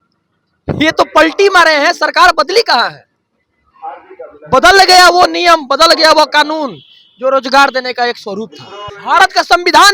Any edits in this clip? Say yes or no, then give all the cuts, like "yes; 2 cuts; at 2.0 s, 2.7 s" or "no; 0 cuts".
yes; 1 cut; at 8.9 s